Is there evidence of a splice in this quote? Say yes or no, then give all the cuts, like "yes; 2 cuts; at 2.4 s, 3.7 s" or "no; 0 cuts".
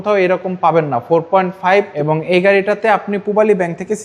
yes; 1 cut; at 1.9 s